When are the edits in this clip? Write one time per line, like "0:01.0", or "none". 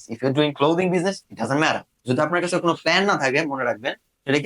0:01.9